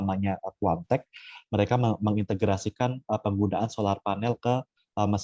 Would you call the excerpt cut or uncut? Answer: uncut